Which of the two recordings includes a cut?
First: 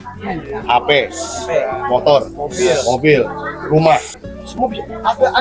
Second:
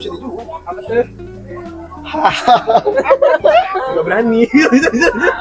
first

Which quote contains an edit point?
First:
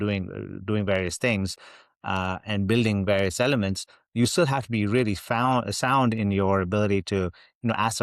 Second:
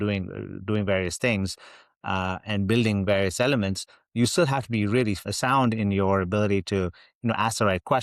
second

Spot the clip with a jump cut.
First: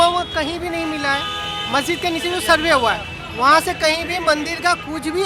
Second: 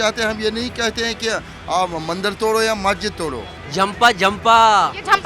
second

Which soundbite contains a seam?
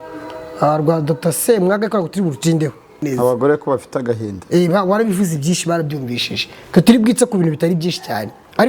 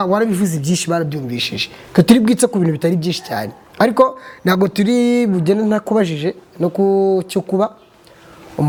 first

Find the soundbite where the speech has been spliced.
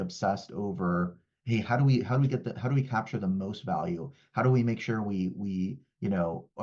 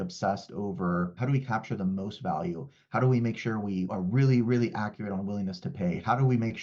second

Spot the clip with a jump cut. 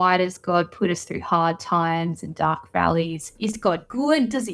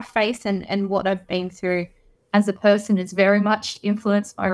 first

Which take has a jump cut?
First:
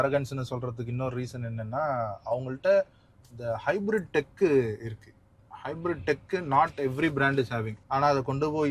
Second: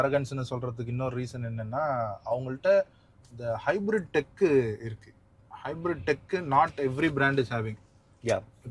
first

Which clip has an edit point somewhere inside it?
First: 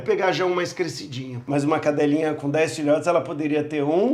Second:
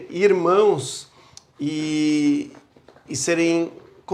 first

